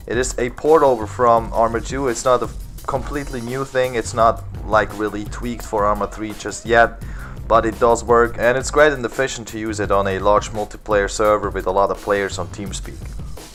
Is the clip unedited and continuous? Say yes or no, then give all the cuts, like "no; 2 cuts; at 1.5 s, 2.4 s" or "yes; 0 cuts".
yes; 0 cuts